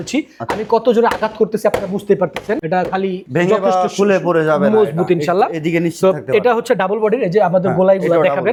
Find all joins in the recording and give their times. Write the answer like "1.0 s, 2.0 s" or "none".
none